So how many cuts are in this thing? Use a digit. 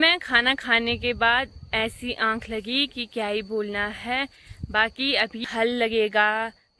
1